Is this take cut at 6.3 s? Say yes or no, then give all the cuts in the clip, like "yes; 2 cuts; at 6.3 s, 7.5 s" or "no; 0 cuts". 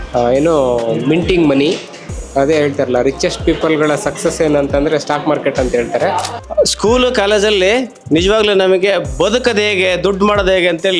yes; 1 cut; at 6.3 s